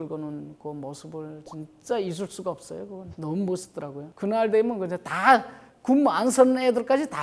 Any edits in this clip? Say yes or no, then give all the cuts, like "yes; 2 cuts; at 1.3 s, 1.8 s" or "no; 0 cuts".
yes; 1 cut; at 4.1 s